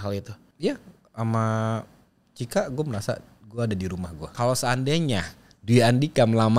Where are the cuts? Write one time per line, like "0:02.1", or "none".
0:04.3